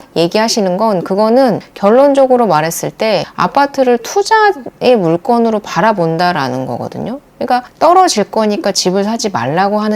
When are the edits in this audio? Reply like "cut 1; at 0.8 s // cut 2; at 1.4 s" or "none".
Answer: cut 1; at 7.7 s